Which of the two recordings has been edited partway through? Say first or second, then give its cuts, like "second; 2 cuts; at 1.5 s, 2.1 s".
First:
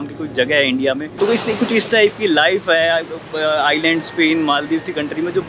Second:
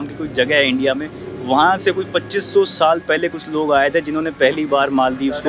first; 1 cut; at 1.1 s